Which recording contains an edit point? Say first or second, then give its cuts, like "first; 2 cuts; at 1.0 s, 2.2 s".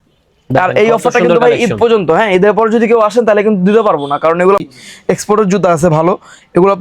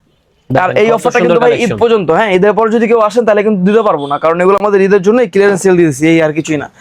first; 1 cut; at 4.6 s